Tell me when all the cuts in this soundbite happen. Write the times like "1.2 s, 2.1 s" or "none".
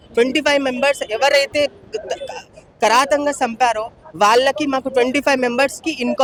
none